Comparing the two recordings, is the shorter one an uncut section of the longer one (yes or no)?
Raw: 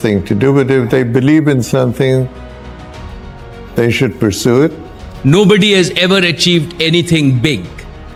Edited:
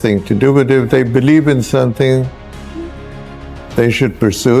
yes